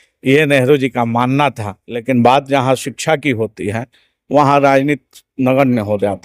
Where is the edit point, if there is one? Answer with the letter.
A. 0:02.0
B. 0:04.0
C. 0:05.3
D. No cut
A